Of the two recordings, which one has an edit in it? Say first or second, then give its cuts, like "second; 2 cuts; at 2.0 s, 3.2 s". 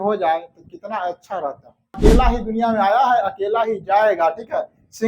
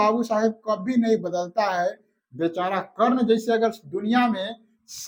first; 1 cut; at 2.0 s